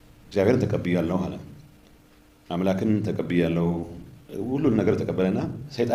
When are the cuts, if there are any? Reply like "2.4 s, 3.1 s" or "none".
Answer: none